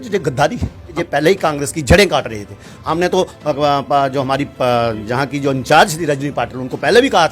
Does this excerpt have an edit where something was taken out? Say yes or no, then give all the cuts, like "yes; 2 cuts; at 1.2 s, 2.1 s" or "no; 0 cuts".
yes; 1 cut; at 0.9 s